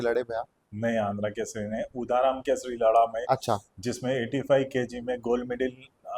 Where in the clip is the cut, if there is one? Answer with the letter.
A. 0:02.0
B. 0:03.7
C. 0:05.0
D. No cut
D